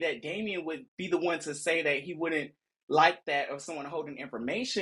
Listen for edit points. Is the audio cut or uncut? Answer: uncut